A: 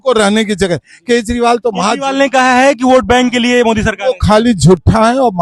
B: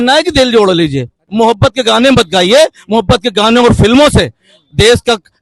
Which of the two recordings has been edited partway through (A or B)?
B